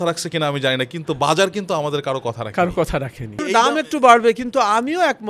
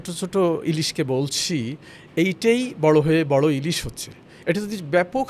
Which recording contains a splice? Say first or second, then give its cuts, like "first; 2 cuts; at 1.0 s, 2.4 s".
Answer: first; 1 cut; at 3.4 s